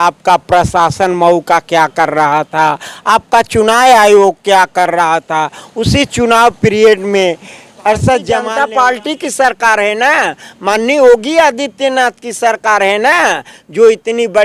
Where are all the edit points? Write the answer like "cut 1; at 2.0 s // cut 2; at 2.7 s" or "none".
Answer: cut 1; at 8.5 s